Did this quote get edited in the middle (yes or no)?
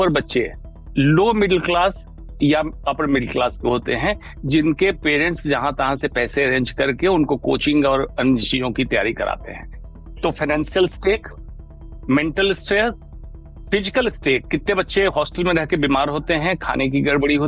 no